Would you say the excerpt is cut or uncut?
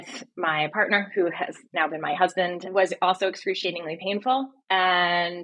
cut